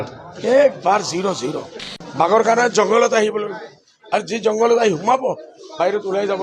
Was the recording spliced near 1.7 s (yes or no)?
yes